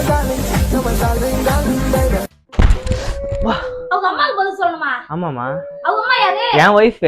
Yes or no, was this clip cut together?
yes